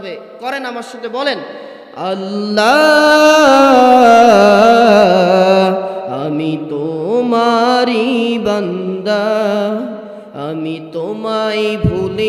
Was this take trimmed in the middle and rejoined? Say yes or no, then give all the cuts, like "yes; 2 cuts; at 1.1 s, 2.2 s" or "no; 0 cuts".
no; 0 cuts